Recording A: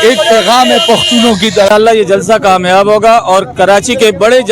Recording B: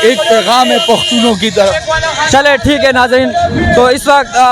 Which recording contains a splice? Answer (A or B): A